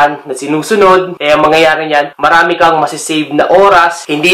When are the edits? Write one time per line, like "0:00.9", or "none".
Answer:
0:01.1
0:02.1